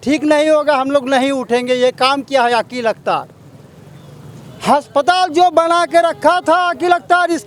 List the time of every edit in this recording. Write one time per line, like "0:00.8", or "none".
none